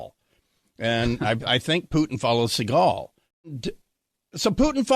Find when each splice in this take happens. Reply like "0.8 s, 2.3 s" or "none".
3.6 s